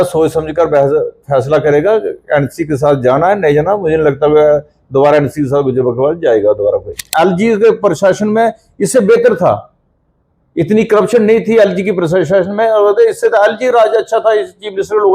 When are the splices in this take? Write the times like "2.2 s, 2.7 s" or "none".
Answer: 7.1 s